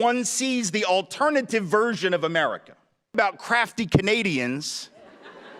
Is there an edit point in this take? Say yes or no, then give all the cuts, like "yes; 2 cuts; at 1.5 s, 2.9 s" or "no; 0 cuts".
yes; 1 cut; at 3.1 s